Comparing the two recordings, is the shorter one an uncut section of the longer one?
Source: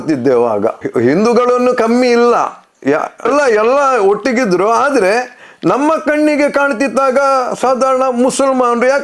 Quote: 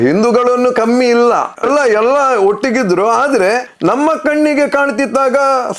no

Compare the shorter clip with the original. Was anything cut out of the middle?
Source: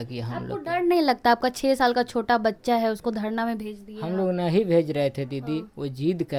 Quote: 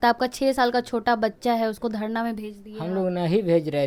no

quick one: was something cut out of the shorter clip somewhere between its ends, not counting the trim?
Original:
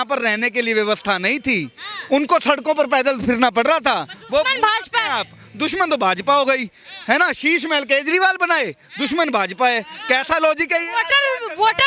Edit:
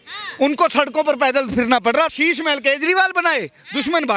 yes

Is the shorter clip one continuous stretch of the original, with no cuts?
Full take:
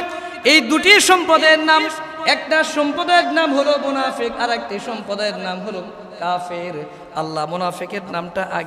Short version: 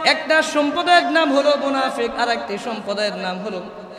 yes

